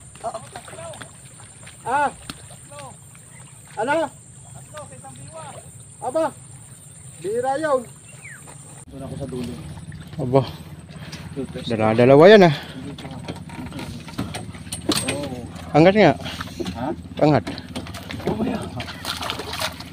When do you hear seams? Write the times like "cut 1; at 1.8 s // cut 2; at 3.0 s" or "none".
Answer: none

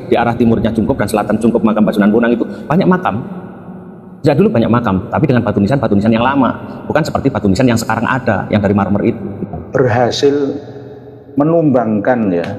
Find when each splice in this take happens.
cut 1; at 9.5 s

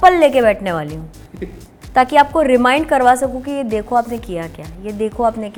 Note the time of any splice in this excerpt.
none

